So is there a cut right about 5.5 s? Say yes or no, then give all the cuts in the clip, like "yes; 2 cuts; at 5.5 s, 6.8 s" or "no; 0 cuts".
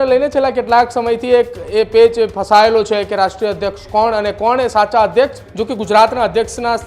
yes; 1 cut; at 5.5 s